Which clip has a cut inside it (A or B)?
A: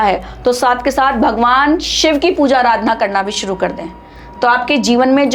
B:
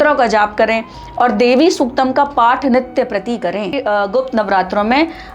B